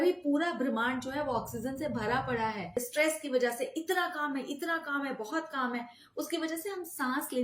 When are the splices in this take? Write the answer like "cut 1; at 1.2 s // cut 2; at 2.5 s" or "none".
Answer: cut 1; at 2.8 s